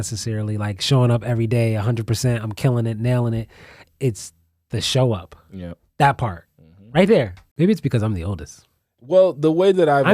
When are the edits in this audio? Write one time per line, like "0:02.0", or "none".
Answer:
0:07.4